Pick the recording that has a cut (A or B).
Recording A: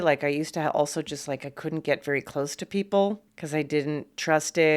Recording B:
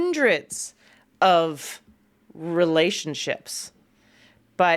A